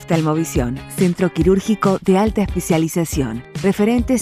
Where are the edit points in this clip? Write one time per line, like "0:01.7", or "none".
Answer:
none